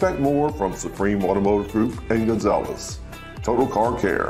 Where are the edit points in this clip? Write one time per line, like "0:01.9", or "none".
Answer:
0:03.0